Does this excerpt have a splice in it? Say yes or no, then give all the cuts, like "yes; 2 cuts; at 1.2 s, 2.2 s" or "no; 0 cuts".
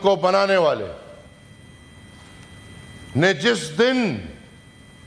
no; 0 cuts